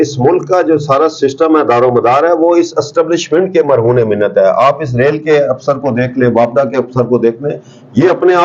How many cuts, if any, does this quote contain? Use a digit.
0